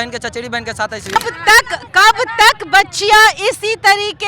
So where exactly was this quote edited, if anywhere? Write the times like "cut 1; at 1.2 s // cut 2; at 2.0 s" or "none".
cut 1; at 1.2 s